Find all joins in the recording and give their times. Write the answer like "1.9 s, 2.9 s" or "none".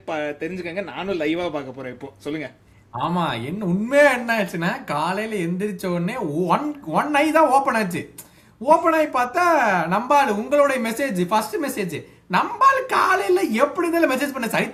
none